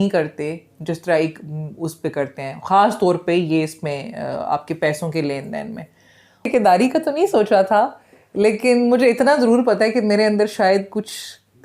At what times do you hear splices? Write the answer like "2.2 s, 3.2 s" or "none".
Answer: 6.5 s